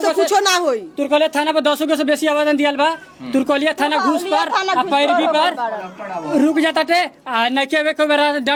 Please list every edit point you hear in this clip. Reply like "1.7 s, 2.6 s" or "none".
none